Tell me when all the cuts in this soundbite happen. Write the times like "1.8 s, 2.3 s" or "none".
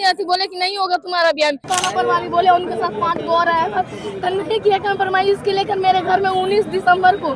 1.6 s